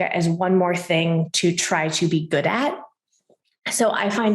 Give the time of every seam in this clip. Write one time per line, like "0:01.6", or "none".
none